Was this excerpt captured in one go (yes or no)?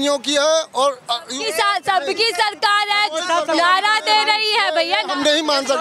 yes